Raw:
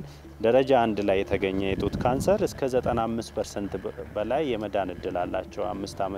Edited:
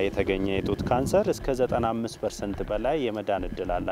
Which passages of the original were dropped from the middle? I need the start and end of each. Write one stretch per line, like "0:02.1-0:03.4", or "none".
0:03.8-0:04.1